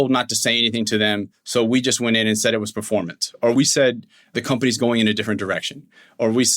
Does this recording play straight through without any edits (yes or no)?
no